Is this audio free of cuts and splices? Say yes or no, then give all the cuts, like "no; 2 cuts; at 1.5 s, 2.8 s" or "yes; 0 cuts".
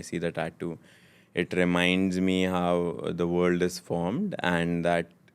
yes; 0 cuts